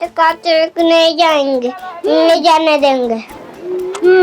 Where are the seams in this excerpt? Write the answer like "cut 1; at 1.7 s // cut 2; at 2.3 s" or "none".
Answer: cut 1; at 3.3 s